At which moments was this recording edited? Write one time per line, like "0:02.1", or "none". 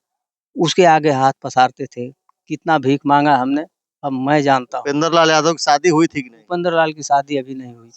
0:04.8

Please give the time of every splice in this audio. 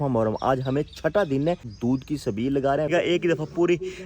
0:01.7
0:02.9

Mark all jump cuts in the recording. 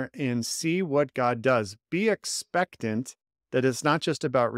none

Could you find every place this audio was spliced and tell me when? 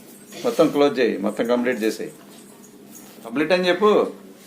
0:03.3

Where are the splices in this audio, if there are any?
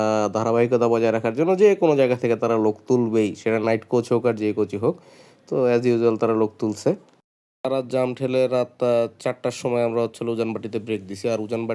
none

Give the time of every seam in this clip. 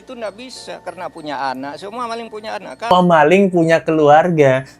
0:02.9

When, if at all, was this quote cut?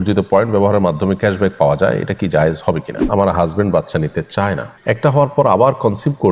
0:03.0
0:04.7

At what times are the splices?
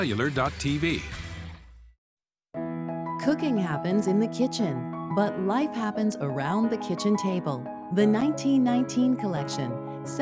none

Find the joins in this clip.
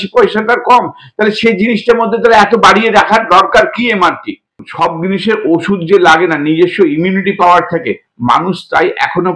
0:04.6

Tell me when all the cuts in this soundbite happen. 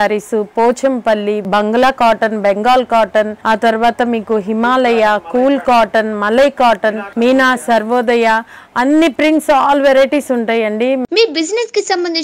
0:01.4
0:03.4
0:07.0
0:11.0

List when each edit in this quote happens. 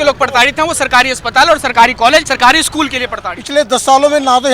0:02.3
0:03.4

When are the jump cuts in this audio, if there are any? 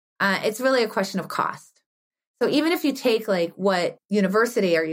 0:04.0

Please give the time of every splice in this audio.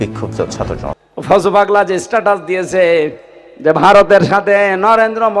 0:00.9

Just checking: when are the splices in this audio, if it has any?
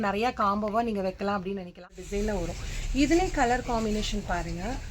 0:01.8

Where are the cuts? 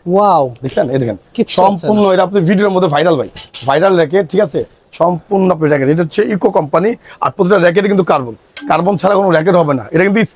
none

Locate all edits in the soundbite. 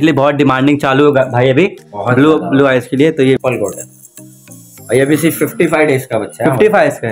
0:03.4

